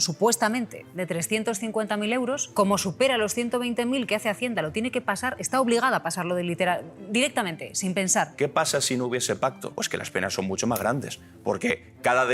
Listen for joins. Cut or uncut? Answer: cut